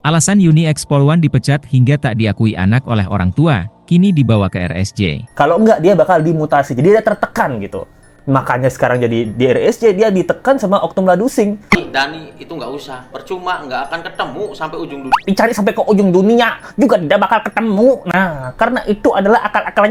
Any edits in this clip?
yes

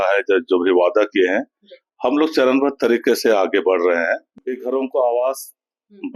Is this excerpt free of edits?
no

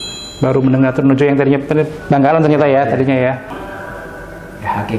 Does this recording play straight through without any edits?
no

